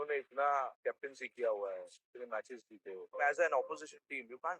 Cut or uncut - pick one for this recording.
cut